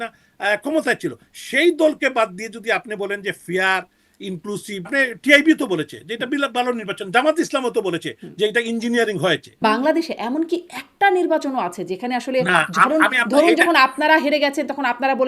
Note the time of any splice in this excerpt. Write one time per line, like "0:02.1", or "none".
0:04.9
0:09.5